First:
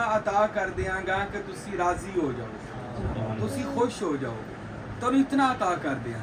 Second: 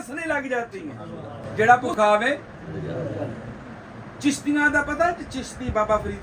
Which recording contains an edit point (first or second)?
second